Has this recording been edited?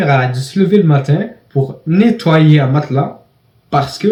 no; 0 cuts

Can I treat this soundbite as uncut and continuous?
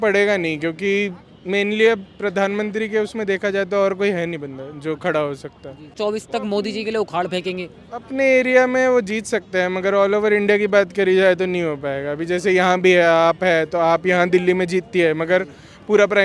no; 1 cut; at 5.9 s

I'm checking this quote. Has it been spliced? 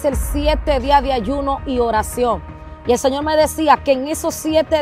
no; 0 cuts

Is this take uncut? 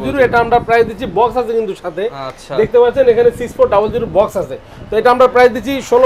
yes; 0 cuts

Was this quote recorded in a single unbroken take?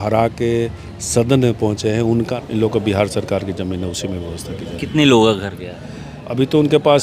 no; 1 cut; at 2.3 s

